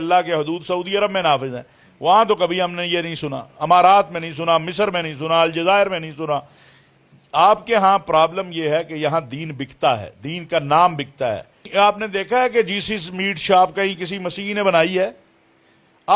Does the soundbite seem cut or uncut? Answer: cut